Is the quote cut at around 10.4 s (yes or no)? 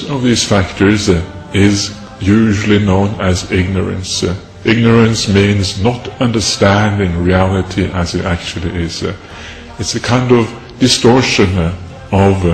no